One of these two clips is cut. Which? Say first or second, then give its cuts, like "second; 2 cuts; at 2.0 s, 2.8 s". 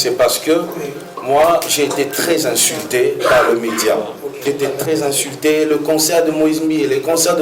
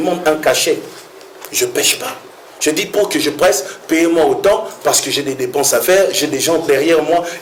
first; 1 cut; at 4.4 s